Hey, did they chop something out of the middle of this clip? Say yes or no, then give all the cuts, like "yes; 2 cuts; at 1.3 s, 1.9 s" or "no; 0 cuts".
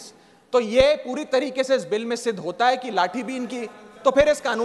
no; 0 cuts